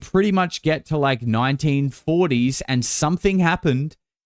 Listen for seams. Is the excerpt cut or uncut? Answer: uncut